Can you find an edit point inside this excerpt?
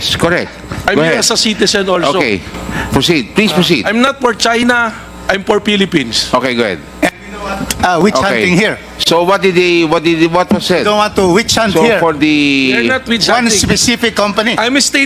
no; 0 cuts

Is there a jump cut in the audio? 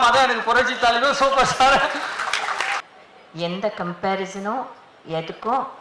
yes; 1 cut; at 2.8 s

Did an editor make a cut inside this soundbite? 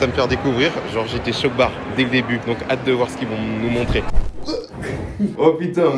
yes; 1 cut; at 4.1 s

